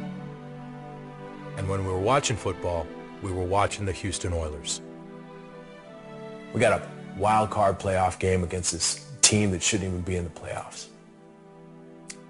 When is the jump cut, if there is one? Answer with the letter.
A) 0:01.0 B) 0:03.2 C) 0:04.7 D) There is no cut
A